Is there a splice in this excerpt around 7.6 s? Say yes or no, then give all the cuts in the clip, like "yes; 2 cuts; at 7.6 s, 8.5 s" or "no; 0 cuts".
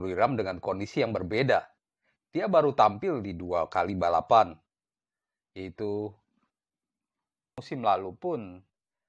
yes; 1 cut; at 7.6 s